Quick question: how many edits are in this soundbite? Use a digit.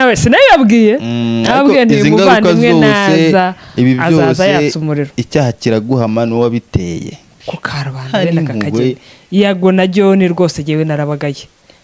1